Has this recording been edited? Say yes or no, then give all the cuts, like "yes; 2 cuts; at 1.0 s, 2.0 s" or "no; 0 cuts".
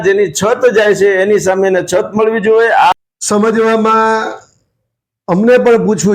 yes; 1 cut; at 2.9 s